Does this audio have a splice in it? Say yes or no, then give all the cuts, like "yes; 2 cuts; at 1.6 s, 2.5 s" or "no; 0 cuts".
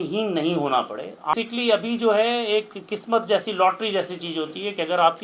yes; 1 cut; at 1.3 s